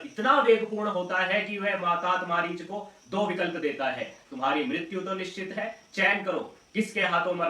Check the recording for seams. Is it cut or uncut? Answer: uncut